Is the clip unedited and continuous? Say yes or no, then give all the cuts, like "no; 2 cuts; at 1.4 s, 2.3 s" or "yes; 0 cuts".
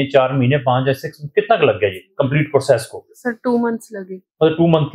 yes; 0 cuts